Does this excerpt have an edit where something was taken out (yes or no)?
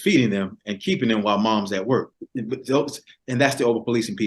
yes